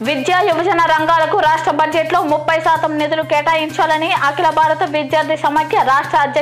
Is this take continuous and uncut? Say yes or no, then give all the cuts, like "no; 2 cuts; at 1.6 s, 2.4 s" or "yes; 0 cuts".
yes; 0 cuts